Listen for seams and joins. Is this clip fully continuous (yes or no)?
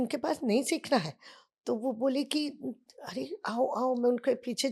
yes